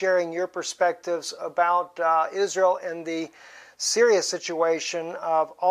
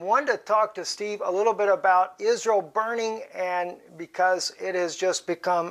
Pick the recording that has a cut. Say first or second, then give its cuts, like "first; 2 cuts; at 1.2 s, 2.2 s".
second; 1 cut; at 4.5 s